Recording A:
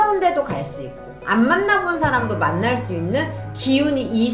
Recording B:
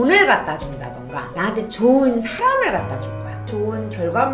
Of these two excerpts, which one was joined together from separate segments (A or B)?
B